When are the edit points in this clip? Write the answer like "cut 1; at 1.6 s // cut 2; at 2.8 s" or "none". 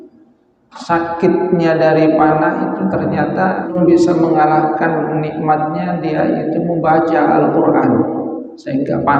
cut 1; at 3.7 s